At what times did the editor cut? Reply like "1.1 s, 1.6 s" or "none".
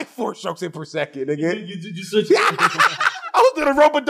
3.1 s

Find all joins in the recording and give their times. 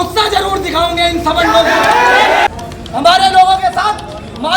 2.5 s

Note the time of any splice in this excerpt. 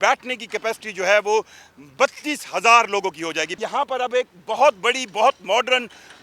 3.5 s

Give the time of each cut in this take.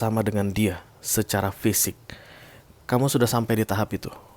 none

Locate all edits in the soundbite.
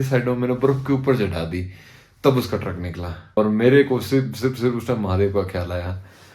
3.4 s

